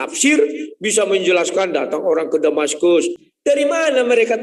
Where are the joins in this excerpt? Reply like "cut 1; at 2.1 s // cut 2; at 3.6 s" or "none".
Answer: cut 1; at 3.2 s